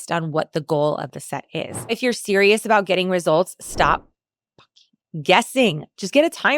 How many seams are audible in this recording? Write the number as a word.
one